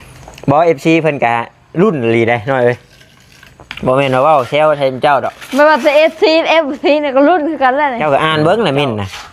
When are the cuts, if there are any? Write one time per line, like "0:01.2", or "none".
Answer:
0:08.0